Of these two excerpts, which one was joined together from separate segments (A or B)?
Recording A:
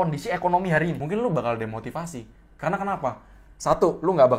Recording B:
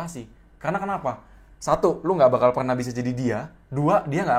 A